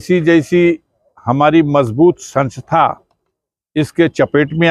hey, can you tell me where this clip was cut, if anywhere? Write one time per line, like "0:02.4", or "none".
none